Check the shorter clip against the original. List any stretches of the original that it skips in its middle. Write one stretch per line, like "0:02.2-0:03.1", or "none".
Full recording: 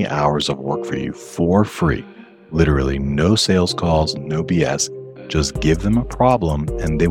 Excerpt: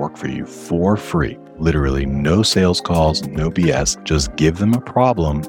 0:02.1-0:02.4
0:04.9-0:05.2